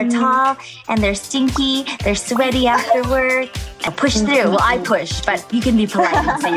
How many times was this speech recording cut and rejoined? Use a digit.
1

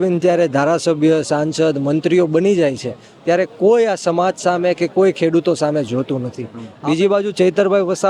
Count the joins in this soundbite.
1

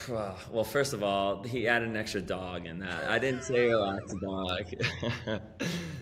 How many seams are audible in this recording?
0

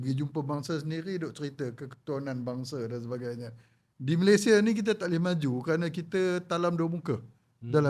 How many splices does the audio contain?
0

